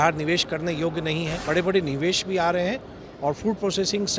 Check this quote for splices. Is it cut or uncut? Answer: cut